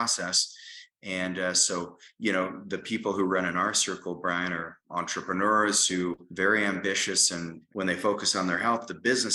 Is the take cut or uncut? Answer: cut